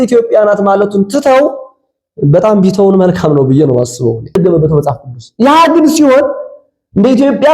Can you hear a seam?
yes; 1 cut; at 4.4 s

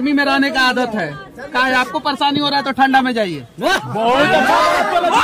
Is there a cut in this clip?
no; 0 cuts

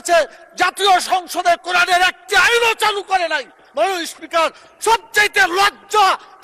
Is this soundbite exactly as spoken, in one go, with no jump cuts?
yes; 0 cuts

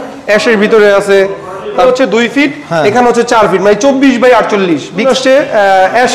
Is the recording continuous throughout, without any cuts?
no; 2 cuts; at 1.8 s, 5.0 s

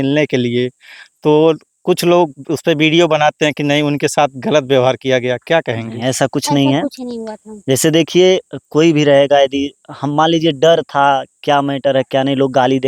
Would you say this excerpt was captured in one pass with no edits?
yes; 0 cuts

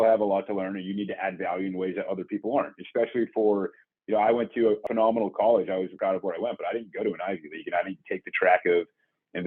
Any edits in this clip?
yes; 2 cuts; at 4.8 s, 5.9 s

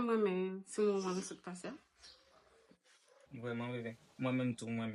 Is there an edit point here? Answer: no; 0 cuts

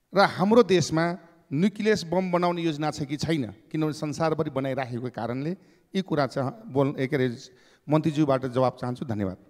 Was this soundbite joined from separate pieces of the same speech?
no; 0 cuts

